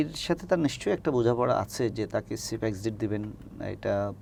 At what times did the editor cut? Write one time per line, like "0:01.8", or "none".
none